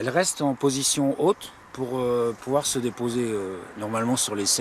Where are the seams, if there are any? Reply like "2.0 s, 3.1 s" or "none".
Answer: 1.6 s